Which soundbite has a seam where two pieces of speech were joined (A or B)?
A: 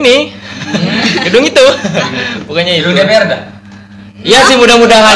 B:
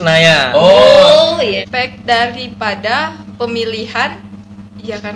B